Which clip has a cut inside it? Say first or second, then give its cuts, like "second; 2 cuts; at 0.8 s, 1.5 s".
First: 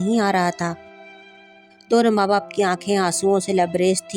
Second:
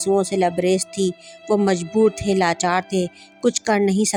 first; 1 cut; at 1.4 s